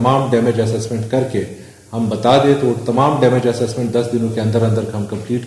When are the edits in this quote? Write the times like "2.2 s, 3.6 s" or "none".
none